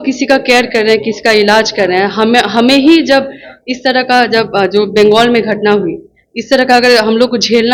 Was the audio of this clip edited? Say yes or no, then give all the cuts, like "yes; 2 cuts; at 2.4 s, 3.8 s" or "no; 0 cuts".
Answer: no; 0 cuts